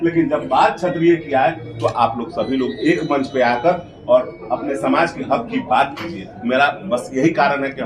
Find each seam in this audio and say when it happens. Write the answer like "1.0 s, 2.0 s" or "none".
none